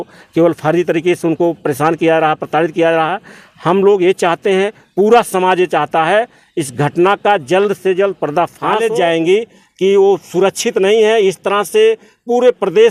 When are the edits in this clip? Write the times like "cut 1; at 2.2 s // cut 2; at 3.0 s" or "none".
cut 1; at 8.8 s